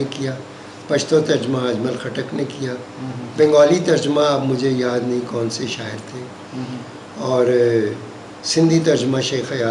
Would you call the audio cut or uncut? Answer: uncut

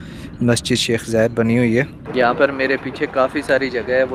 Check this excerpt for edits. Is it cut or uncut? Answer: cut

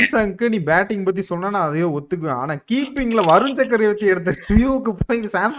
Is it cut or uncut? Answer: uncut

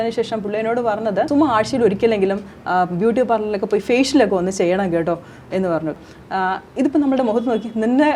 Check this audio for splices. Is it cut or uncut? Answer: cut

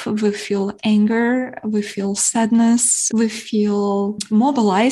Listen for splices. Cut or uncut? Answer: uncut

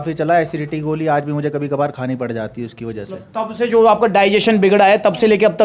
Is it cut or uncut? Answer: uncut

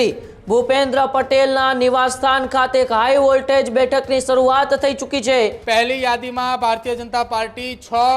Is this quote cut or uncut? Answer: cut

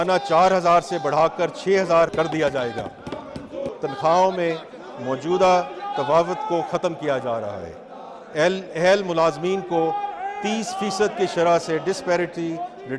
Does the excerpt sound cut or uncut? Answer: cut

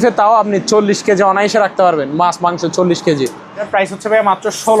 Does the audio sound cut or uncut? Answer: cut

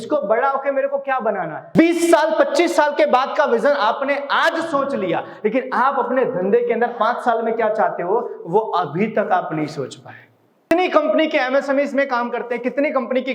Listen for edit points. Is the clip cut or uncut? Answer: cut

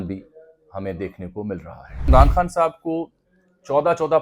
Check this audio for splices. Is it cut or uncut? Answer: cut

